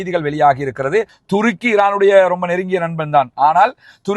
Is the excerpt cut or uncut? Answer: cut